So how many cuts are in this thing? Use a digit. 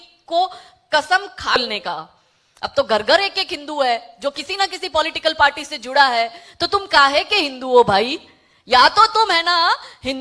1